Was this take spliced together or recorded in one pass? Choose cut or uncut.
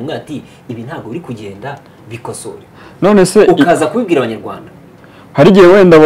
uncut